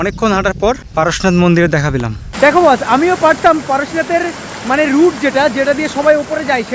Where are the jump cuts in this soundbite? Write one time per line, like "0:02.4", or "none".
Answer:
0:00.9
0:02.2